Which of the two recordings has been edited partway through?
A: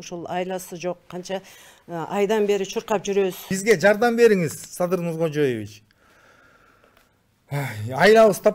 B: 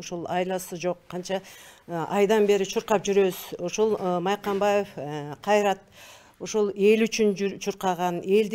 A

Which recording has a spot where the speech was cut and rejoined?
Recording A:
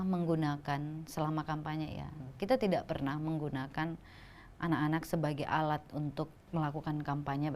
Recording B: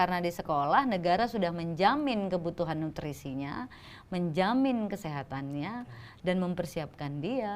A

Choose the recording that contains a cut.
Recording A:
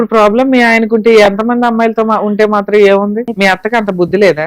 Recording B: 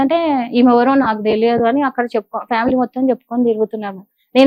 A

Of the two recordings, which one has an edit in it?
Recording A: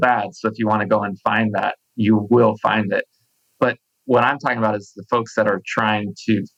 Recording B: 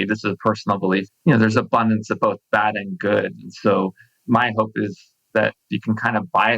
B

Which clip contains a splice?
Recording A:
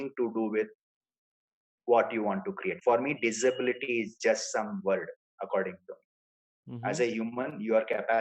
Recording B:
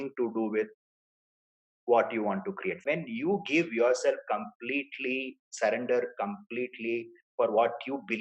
B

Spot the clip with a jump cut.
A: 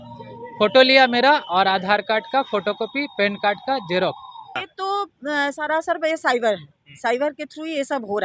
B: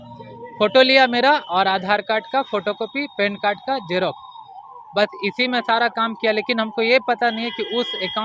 A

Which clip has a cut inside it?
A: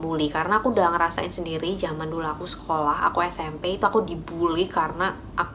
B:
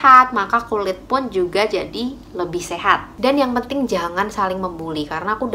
B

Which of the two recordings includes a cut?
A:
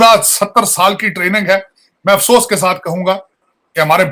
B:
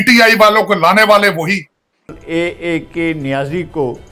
B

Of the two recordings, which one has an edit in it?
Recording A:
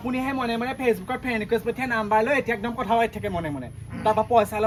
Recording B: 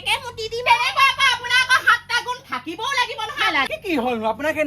B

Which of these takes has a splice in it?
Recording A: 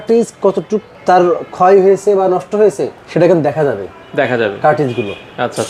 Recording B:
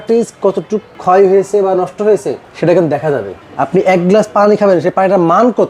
B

